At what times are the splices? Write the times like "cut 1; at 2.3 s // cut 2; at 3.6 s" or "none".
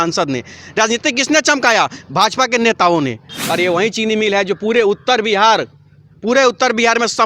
cut 1; at 3.3 s